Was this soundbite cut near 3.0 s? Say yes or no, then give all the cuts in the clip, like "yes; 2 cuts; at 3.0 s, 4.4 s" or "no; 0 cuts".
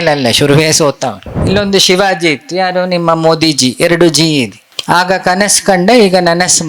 no; 2 cuts; at 1.3 s, 4.7 s